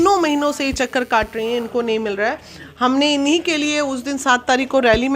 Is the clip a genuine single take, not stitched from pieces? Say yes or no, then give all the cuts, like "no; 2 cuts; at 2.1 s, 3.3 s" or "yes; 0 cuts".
yes; 0 cuts